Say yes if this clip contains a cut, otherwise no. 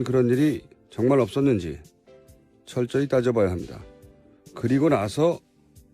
yes